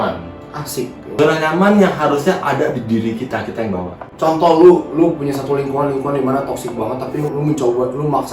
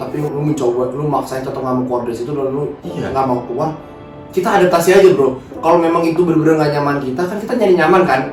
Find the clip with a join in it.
first; 2 cuts; at 1.0 s, 4.0 s

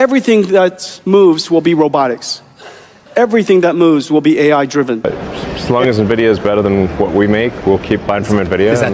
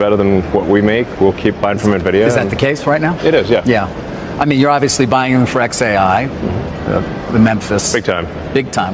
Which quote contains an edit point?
first; 1 cut; at 5.1 s

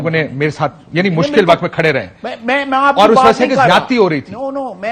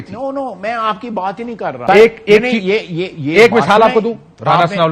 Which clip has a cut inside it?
second; 1 cut; at 1.7 s

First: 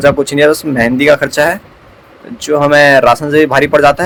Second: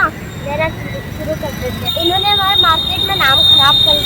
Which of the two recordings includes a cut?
second; 1 cut; at 1.9 s

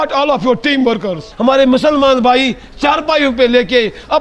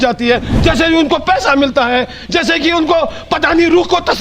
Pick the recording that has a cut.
first; 1 cut; at 1.3 s

